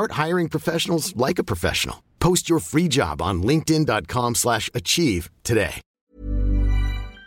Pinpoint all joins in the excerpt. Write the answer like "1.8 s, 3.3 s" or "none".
5.9 s